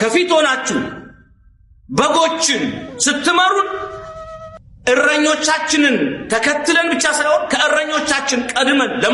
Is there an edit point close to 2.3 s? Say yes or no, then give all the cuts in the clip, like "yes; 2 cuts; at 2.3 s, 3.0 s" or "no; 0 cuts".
no; 0 cuts